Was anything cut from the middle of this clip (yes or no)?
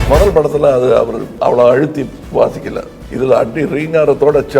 yes